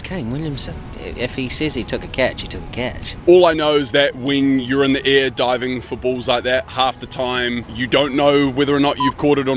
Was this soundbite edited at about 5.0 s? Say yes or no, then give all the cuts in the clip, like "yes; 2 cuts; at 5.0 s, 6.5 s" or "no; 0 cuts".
no; 4 cuts; at 0.9 s, 3.1 s, 6.7 s, 7.7 s